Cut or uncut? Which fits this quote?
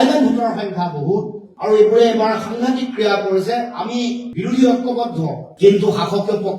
cut